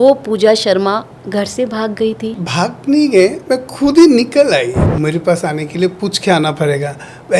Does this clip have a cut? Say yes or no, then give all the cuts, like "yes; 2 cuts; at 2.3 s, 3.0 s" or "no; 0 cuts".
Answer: yes; 2 cuts; at 2.4 s, 4.8 s